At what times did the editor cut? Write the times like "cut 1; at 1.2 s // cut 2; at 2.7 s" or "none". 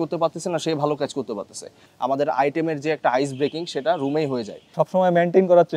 cut 1; at 1.8 s // cut 2; at 4.6 s